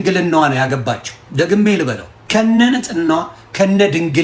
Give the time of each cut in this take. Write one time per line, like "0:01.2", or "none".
0:01.2
0:02.1